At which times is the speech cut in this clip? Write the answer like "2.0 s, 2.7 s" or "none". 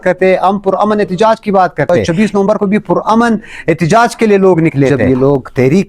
2.0 s, 5.0 s